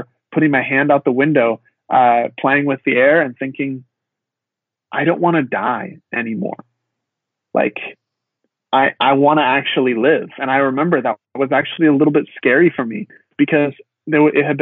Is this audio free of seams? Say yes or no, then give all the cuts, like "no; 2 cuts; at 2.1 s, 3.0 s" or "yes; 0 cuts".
yes; 0 cuts